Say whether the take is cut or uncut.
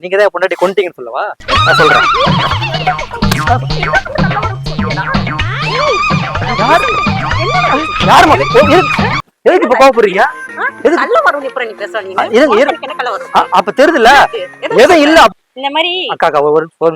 cut